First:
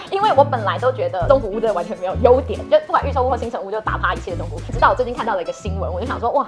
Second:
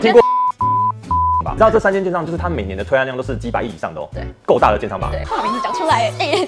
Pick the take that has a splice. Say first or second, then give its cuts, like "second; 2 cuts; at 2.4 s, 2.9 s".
second; 2 cuts; at 1.5 s, 5.1 s